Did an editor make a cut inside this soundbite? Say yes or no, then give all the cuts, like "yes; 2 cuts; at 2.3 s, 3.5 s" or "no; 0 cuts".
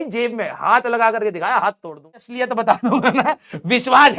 yes; 1 cut; at 2.3 s